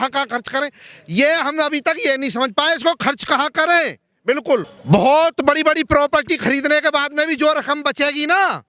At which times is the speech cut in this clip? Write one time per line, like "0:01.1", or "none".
0:04.7